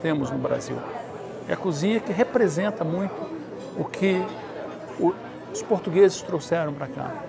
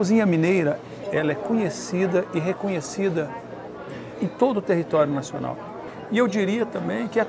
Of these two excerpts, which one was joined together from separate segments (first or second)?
second